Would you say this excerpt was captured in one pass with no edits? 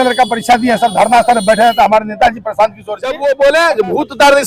no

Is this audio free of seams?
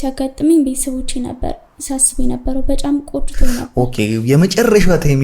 yes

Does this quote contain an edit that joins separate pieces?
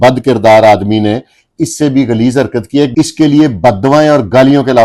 yes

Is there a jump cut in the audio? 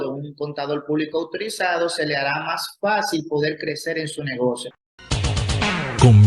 yes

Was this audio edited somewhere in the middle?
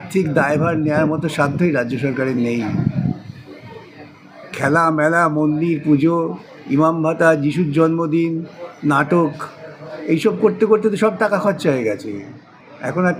no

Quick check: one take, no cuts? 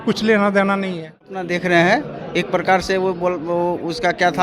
no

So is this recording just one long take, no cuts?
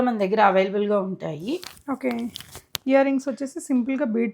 yes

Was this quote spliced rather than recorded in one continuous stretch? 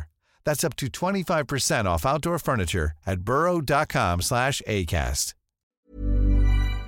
yes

